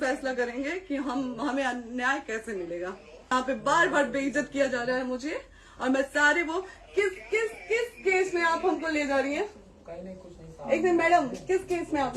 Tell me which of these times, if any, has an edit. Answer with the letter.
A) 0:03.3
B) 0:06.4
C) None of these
A